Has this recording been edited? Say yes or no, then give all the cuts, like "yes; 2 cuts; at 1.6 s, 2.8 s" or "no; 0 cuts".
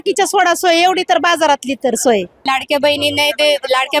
yes; 1 cut; at 2.4 s